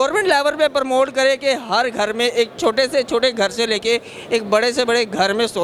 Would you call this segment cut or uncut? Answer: uncut